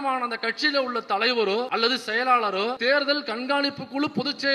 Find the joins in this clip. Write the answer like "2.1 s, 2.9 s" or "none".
1.7 s, 2.8 s